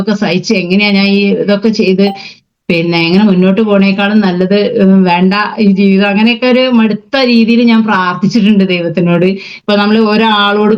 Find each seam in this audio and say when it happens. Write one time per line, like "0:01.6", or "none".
0:09.5